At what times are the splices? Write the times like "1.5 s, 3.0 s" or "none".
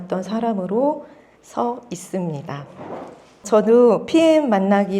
3.4 s